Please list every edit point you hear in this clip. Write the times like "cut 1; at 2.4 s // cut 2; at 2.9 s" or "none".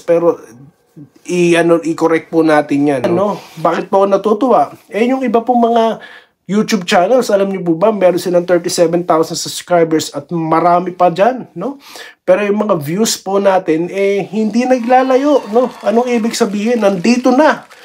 cut 1; at 3.1 s